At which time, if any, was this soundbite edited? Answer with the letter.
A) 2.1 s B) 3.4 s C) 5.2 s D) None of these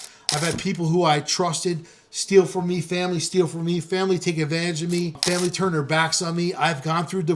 C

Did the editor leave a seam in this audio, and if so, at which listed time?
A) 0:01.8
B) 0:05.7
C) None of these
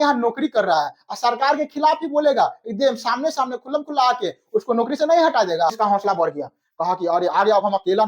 B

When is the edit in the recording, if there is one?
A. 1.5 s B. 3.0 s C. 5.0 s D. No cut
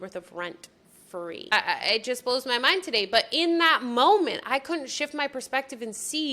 A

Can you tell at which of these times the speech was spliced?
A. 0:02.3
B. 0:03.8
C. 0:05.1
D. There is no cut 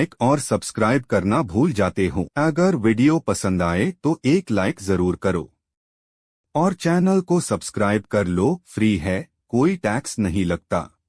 A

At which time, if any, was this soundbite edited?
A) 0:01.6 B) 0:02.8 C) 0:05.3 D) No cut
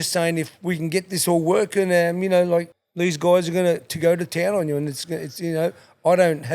B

